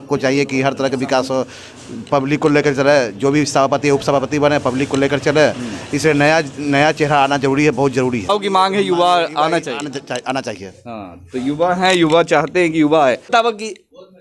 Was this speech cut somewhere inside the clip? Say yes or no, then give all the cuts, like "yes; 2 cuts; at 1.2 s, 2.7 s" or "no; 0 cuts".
yes; 2 cuts; at 8.3 s, 13.3 s